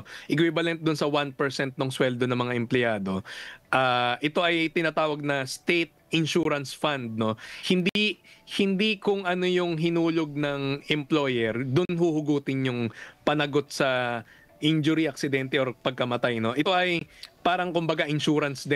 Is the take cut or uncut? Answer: uncut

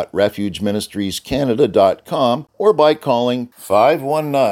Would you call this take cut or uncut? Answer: cut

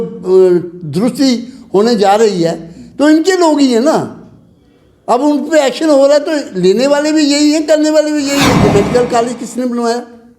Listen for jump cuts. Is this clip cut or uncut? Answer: cut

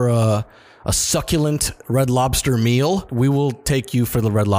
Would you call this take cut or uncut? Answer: cut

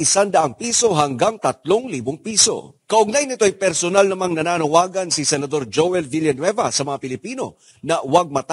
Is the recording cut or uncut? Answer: uncut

